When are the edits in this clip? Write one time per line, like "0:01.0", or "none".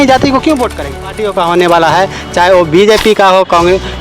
0:01.0